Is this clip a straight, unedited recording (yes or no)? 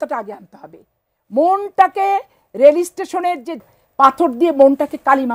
no